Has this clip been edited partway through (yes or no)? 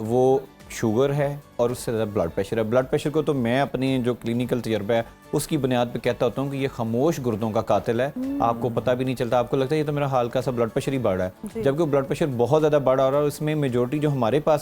no